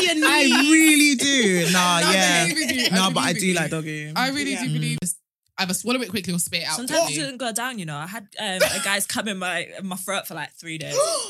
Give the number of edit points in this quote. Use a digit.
1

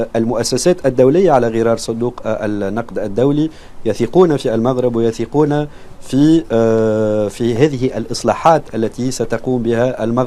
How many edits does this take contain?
0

